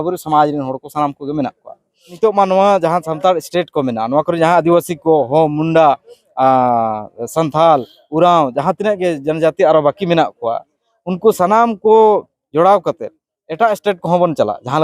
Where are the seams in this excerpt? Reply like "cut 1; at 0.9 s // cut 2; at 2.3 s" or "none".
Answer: cut 1; at 2.0 s